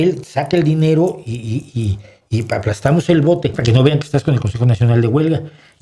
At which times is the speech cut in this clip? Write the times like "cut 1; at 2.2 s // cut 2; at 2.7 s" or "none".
cut 1; at 3.6 s